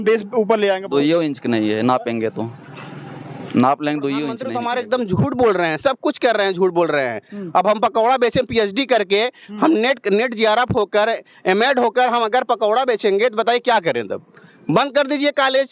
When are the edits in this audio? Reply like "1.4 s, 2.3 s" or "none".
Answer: 4.4 s